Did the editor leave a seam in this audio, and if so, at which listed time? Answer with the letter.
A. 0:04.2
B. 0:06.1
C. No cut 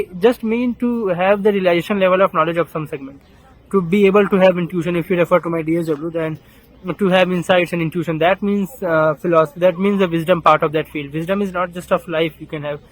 C